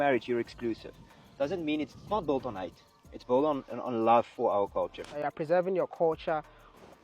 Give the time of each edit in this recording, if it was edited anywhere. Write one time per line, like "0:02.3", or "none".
0:05.2